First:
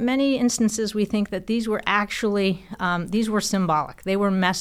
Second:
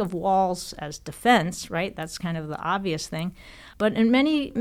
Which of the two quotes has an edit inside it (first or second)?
second